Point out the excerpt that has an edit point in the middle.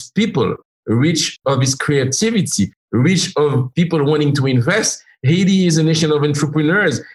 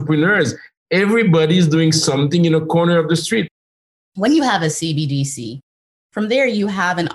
second; 1 cut; at 3.8 s

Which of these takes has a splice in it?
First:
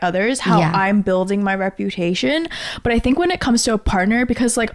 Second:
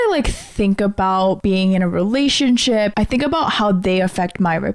second; 2 cuts; at 1.4 s, 2.9 s

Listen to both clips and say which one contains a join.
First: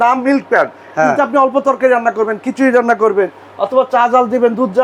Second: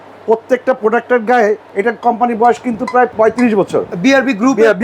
second; 2 cuts; at 1.7 s, 3.1 s

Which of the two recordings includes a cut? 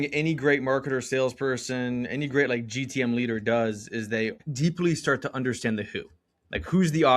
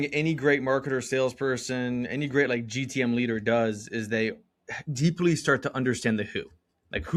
first; 1 cut; at 4.4 s

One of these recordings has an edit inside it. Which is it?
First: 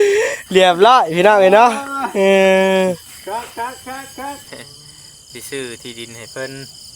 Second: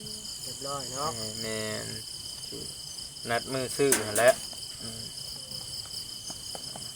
first; 1 cut; at 4.5 s

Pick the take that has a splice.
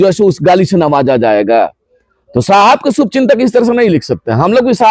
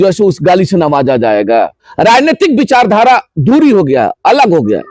second; 1 cut; at 1.8 s

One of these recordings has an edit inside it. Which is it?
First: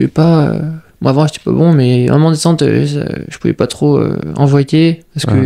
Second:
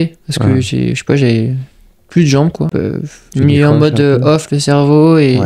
second; 1 cut; at 2.7 s

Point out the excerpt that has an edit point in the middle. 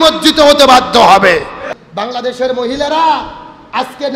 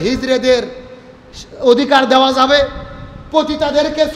first; 1 cut; at 1.6 s

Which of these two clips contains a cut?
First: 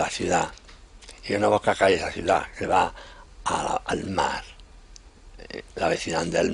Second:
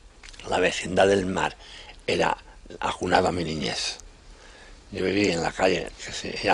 first; 1 cut; at 1.7 s

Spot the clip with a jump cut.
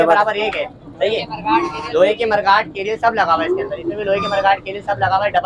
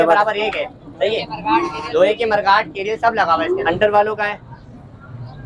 second; 1 cut; at 3.6 s

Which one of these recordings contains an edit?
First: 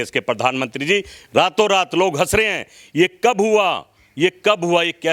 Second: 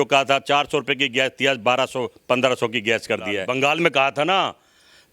second; 1 cut; at 3.4 s

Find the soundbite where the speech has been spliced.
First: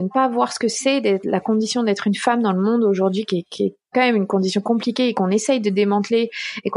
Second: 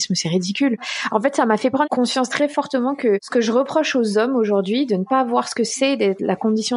second; 3 cuts; at 0.9 s, 1.9 s, 3.3 s

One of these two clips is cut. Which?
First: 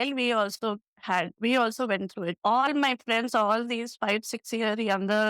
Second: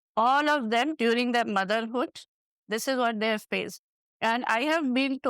second; 1 cut; at 4.0 s

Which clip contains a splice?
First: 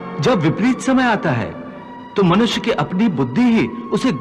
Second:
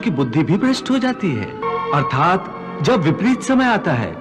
second; 1 cut; at 1.6 s

